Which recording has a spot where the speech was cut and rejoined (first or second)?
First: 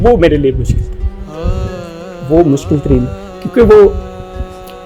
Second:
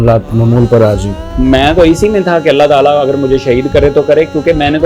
second